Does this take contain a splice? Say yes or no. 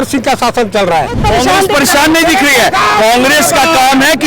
yes